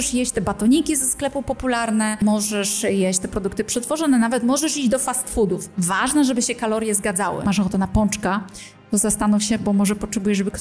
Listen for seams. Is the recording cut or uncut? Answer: cut